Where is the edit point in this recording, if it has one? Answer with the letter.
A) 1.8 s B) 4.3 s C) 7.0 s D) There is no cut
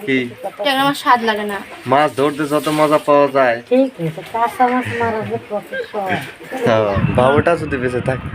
C